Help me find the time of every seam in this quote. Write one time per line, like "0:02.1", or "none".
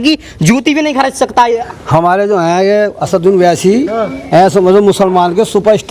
0:01.6